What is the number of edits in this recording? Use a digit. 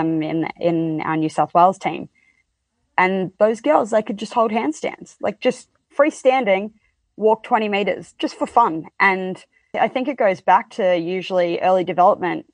1